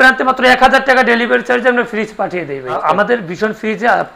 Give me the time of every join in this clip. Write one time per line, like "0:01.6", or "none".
0:02.8